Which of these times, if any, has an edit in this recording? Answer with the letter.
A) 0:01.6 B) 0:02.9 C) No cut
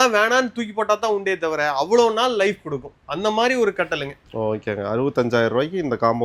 C